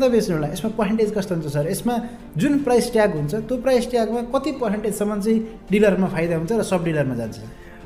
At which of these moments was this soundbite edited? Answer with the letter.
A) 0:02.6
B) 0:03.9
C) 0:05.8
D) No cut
D